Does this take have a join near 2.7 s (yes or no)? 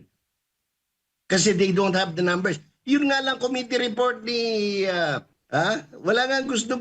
no